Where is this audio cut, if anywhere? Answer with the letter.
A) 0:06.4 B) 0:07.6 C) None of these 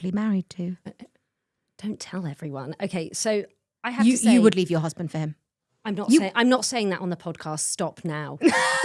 C